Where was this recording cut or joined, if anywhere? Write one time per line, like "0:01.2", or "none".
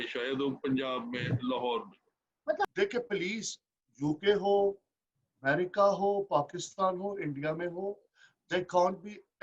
0:02.7